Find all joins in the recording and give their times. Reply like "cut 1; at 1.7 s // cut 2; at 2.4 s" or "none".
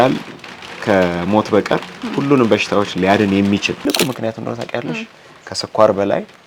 cut 1; at 3.8 s